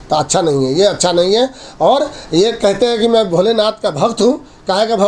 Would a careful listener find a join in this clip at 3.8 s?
no; 0 cuts

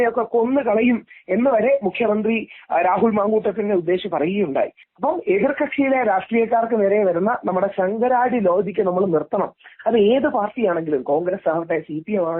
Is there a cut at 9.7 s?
no; 1 cut; at 4.8 s

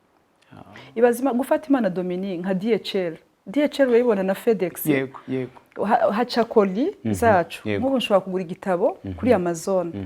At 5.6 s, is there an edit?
no; 0 cuts

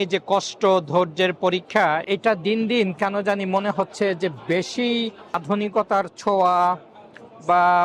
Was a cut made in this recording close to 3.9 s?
no; 2 cuts; at 2.0 s, 5.4 s

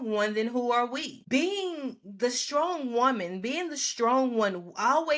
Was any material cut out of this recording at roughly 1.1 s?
yes; 1 cut; at 1.1 s

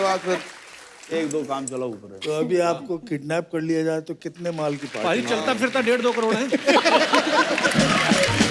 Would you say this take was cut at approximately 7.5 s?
no; 0 cuts

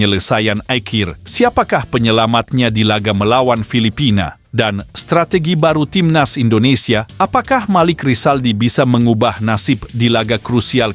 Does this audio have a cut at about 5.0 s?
no; 0 cuts

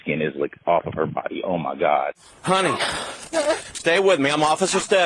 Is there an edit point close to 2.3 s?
yes; 1 cut; at 2.3 s

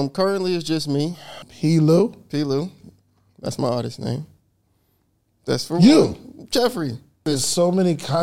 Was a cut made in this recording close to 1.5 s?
yes; 2 cuts; at 1.5 s, 7.2 s

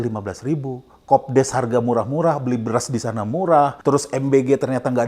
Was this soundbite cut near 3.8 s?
yes; 1 cut; at 3.8 s

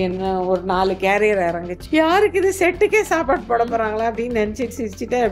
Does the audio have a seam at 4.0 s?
no; 1 cut; at 1.7 s

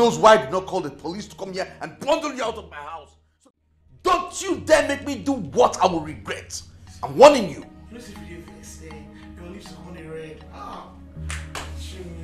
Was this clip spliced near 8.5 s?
no; 1 cut; at 3.4 s

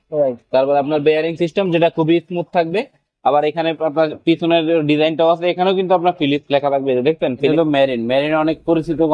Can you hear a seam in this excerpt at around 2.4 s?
no; 1 cut; at 7.5 s

